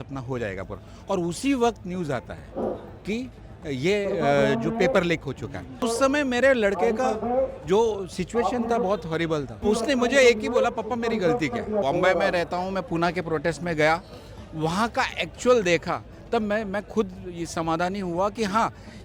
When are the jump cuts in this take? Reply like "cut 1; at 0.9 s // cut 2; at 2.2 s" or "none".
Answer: cut 1; at 5.8 s // cut 2; at 9.5 s // cut 3; at 11.8 s